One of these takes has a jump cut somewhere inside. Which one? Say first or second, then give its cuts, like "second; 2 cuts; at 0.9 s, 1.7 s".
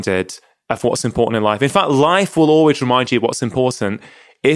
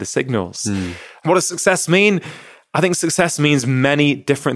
second; 1 cut; at 1.0 s